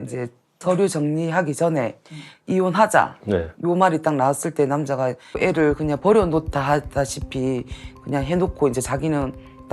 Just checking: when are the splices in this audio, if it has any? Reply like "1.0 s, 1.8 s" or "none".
5.2 s